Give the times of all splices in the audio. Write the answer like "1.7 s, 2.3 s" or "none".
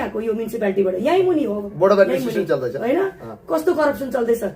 none

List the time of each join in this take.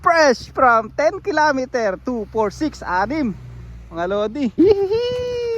4.6 s

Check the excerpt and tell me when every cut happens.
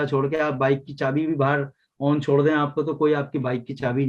none

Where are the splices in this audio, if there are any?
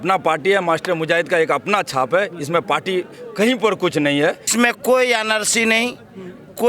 4.5 s

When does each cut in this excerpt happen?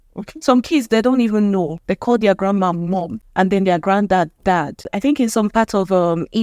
1.8 s, 3.2 s, 4.9 s

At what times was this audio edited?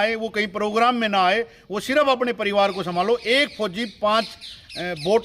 none

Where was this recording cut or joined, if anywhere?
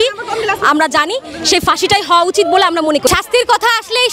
3.1 s

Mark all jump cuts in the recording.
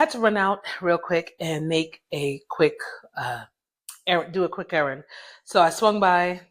none

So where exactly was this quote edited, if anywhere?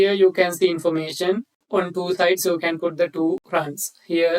1.5 s, 3.4 s

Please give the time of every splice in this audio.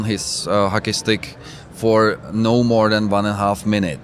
none

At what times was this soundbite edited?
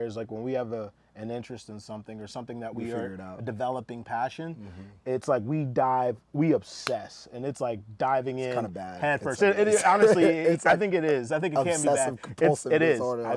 none

